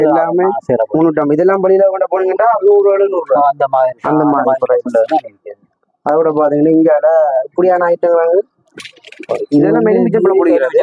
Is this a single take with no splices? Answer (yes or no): yes